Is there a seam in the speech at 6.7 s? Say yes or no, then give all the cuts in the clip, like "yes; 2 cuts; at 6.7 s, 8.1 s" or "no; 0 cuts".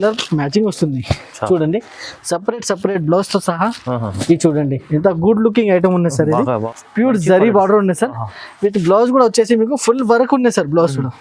yes; 1 cut; at 6.7 s